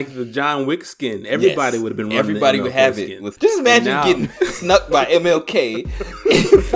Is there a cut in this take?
yes; 1 cut; at 3.2 s

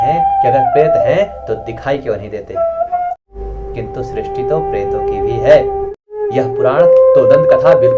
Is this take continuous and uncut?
no; 2 cuts; at 3.2 s, 6.0 s

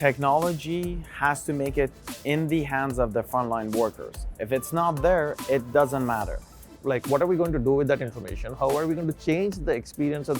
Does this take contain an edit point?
yes; 1 cut; at 6.6 s

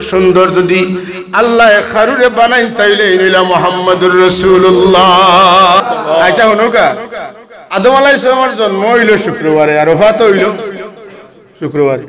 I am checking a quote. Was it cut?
yes; 1 cut; at 5.8 s

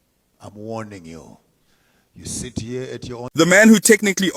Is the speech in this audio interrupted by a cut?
yes; 1 cut; at 3.3 s

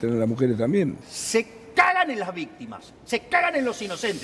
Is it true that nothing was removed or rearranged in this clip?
no; 1 cut; at 1.1 s

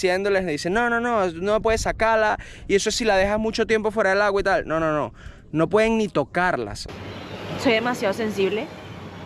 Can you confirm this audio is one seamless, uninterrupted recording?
no; 1 cut; at 6.9 s

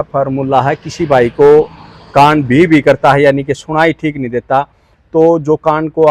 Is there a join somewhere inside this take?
no; 0 cuts

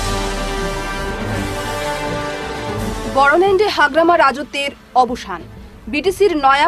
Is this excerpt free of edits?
yes; 0 cuts

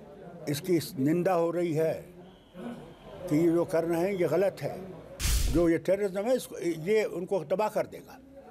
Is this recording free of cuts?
no; 1 cut; at 5.3 s

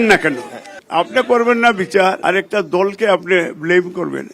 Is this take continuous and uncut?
no; 1 cut; at 2.2 s

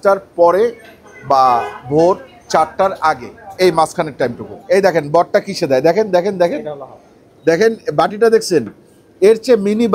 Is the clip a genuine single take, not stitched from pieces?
yes; 0 cuts

